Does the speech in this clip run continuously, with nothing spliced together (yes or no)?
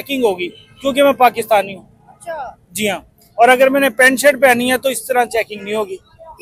yes